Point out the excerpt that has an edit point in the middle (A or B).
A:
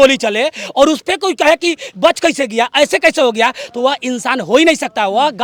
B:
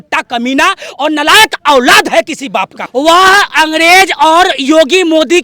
B